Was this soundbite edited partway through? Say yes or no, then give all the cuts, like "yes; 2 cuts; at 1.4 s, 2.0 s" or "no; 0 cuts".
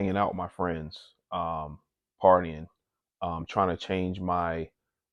no; 0 cuts